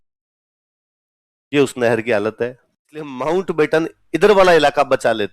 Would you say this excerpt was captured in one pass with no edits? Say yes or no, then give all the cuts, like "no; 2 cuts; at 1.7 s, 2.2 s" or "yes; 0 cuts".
no; 1 cut; at 3.1 s